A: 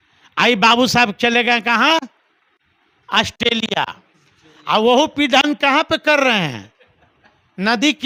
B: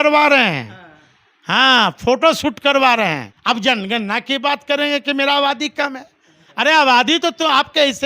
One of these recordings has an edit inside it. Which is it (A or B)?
B